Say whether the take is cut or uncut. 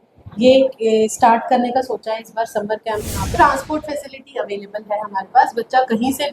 cut